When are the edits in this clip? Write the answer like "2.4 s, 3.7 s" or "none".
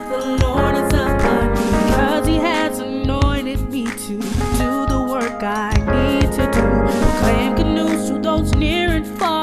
3.6 s